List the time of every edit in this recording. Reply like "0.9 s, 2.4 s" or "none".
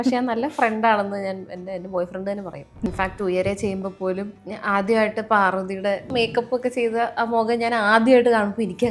2.9 s, 4.3 s, 6.1 s